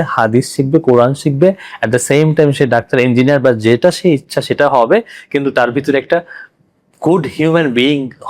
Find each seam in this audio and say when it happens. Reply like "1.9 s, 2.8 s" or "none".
none

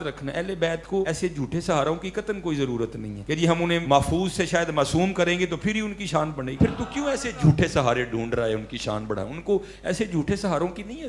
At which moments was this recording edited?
1.1 s, 3.1 s, 3.8 s, 6.5 s

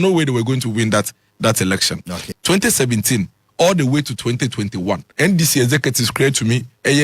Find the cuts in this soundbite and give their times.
2.2 s, 5.1 s

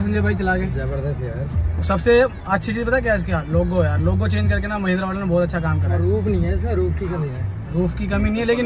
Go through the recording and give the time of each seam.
none

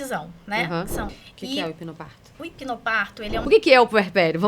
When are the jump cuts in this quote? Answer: 1.2 s, 3.4 s

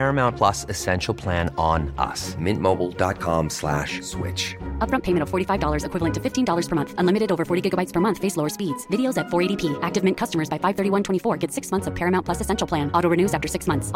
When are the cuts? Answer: none

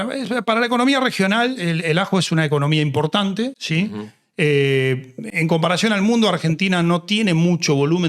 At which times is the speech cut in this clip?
none

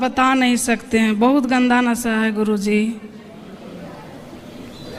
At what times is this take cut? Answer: none

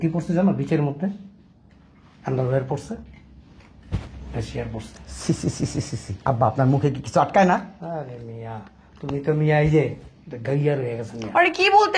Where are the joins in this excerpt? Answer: none

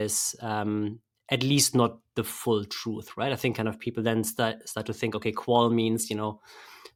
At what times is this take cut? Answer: none

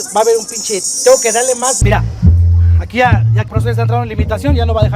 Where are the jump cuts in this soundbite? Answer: 1.8 s

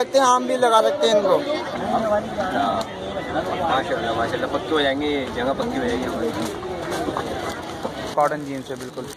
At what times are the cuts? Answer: 1.7 s, 8.1 s

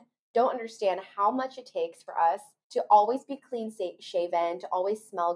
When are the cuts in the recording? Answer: none

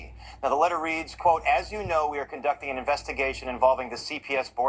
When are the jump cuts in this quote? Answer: none

